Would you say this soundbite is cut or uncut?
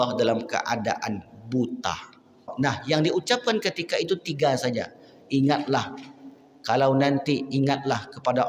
cut